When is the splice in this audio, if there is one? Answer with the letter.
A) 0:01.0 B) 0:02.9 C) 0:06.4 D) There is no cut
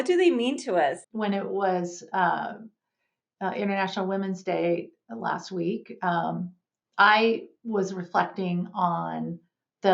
A